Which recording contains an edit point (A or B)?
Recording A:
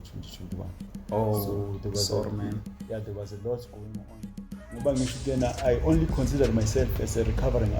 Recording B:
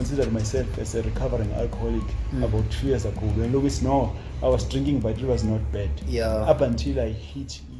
A